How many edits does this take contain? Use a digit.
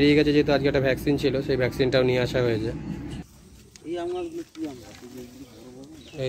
1